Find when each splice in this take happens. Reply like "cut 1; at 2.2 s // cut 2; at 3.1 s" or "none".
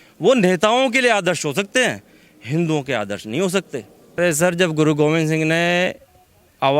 cut 1; at 4.1 s

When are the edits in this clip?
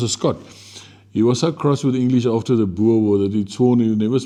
none

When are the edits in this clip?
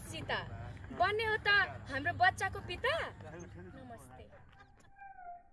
none

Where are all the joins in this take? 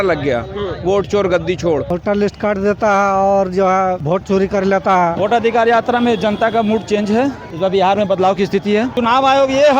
cut 1; at 2.3 s // cut 2; at 4.0 s // cut 3; at 5.2 s // cut 4; at 7.5 s // cut 5; at 8.9 s

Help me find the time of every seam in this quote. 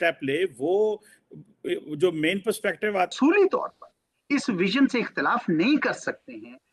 cut 1; at 3.1 s

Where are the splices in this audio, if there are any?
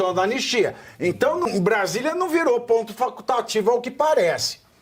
cut 1; at 1.5 s

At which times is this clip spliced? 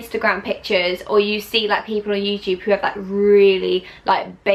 none

